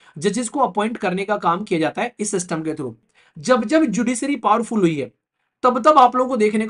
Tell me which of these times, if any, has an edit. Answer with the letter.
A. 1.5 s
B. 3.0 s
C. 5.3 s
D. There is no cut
B